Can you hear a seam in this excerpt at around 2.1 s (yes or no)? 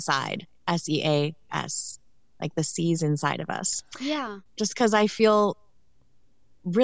no